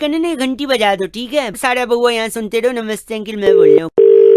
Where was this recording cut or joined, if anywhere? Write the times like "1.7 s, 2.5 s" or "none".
3.5 s